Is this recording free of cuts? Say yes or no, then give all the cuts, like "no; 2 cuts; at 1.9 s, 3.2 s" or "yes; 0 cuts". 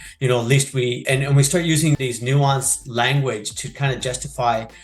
no; 2 cuts; at 1.0 s, 2.0 s